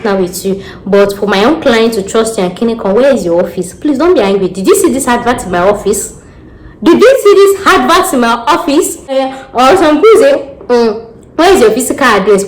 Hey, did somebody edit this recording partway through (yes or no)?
yes